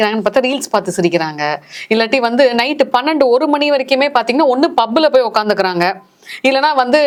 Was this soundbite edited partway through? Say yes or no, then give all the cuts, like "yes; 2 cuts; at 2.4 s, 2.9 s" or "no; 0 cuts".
no; 0 cuts